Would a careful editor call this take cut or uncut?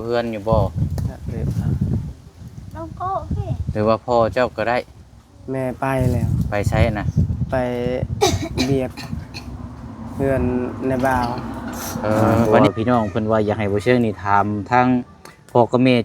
cut